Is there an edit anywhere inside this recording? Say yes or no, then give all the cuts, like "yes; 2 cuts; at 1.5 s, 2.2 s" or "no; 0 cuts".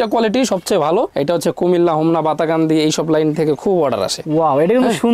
yes; 1 cut; at 1.1 s